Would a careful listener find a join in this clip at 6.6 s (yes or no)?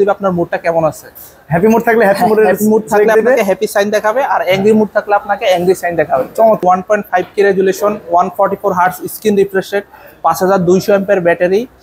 yes